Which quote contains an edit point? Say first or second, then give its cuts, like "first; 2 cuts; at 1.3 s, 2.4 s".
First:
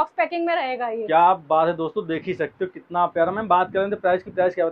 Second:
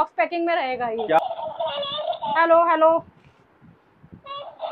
second; 1 cut; at 1.2 s